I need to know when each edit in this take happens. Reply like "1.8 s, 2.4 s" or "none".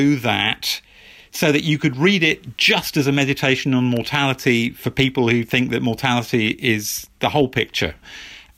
none